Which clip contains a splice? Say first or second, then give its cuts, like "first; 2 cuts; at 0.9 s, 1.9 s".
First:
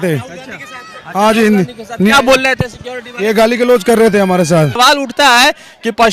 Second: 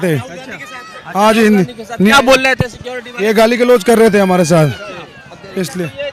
first; 1 cut; at 4.8 s